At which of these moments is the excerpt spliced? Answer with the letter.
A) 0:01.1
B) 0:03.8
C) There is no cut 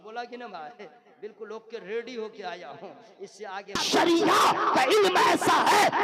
B